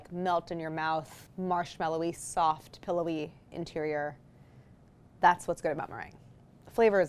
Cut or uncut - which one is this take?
cut